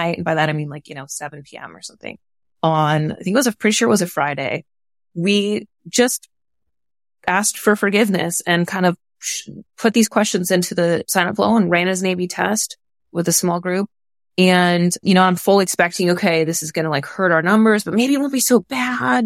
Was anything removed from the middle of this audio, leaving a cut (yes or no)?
yes